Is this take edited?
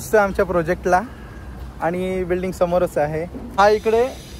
yes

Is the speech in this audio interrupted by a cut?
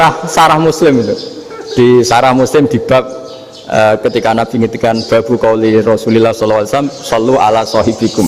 no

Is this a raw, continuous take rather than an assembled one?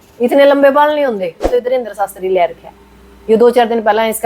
no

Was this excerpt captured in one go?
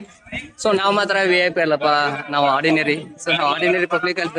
yes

